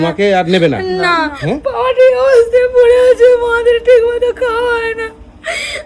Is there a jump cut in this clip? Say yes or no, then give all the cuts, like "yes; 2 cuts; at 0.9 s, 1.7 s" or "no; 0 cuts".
yes; 1 cut; at 1.4 s